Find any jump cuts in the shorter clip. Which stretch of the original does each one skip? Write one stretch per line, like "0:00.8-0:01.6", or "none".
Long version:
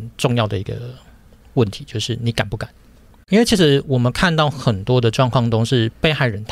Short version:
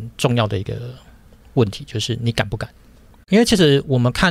none